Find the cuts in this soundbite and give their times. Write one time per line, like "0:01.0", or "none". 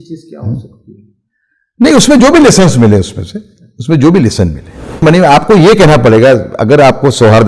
0:05.0